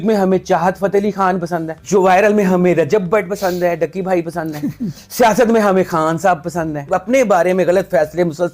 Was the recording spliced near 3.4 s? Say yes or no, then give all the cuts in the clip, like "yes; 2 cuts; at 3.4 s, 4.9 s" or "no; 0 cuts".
no; 2 cuts; at 1.7 s, 6.9 s